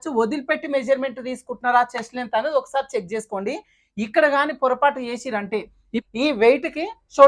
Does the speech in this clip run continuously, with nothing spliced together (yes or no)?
no